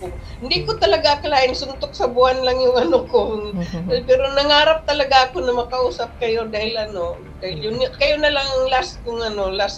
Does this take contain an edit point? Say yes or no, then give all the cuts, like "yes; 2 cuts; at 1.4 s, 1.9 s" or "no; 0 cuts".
no; 0 cuts